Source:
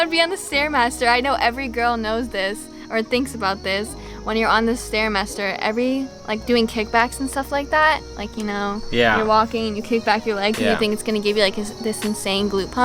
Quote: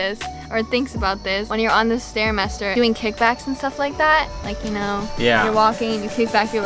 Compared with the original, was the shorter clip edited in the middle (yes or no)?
yes